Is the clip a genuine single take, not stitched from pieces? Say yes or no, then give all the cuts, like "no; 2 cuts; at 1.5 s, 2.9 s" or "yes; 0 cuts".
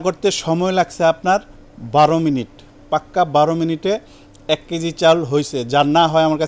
yes; 0 cuts